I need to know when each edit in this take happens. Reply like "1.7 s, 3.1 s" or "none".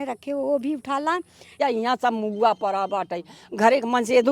1.5 s